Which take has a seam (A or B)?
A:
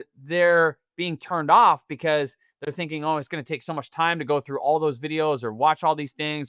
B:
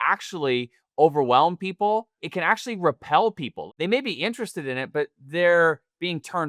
B